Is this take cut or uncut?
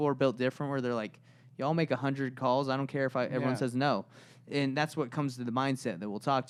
uncut